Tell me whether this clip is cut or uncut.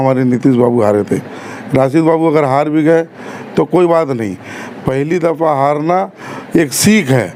uncut